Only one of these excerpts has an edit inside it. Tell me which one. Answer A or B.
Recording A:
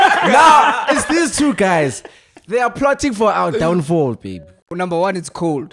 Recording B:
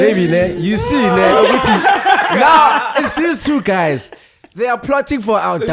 A